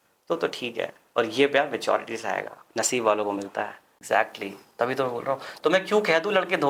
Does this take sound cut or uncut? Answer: cut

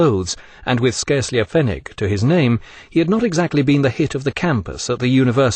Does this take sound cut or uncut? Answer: cut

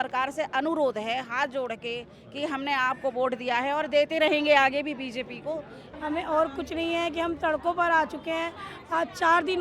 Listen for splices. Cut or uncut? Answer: cut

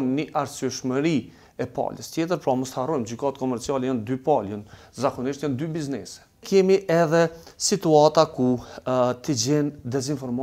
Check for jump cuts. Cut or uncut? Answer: cut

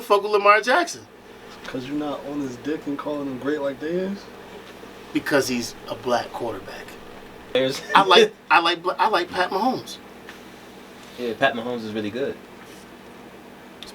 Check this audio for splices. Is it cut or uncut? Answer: cut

